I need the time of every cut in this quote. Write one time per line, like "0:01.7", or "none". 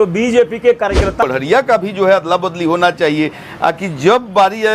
0:01.2